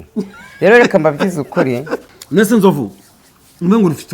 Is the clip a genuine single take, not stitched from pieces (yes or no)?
no